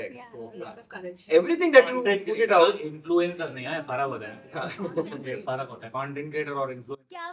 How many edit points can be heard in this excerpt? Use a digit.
0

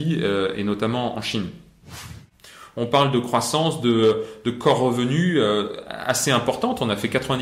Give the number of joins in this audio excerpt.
1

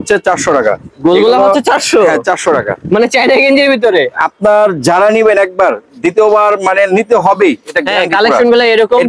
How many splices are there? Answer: 0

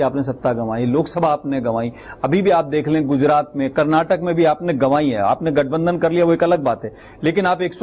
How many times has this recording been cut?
0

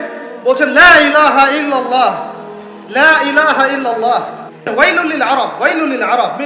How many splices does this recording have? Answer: 1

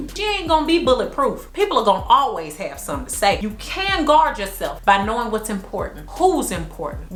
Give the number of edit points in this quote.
0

